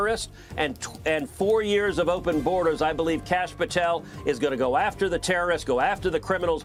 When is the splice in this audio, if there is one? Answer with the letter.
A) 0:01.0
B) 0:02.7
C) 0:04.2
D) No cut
D